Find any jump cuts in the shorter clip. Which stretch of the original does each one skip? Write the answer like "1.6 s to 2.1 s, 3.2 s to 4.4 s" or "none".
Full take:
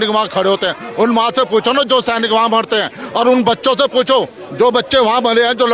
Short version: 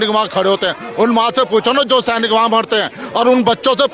none